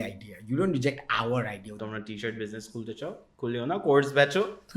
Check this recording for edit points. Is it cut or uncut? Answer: cut